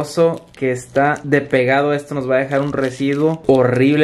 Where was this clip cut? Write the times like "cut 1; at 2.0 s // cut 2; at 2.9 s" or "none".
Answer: none